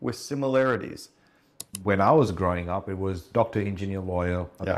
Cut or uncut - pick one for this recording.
cut